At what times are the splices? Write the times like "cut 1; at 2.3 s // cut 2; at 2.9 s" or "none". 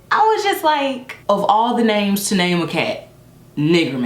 cut 1; at 1.1 s